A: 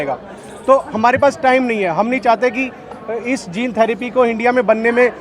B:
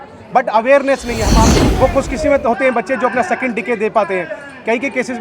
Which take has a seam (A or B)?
B